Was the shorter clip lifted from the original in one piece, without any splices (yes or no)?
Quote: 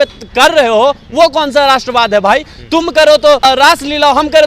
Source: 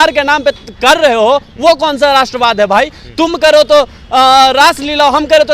no